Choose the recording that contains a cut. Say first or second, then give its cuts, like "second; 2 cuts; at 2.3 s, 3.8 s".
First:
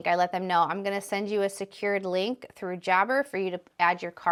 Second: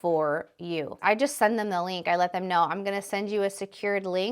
second; 1 cut; at 0.9 s